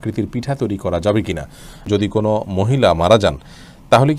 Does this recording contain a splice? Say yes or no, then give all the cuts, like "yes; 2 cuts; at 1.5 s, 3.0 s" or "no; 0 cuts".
yes; 1 cut; at 1.9 s